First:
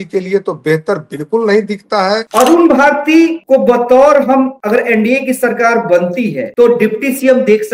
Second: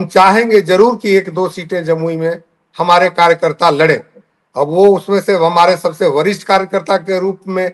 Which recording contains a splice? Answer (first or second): first